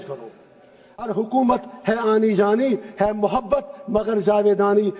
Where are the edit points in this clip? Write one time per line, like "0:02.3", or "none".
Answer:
0:01.0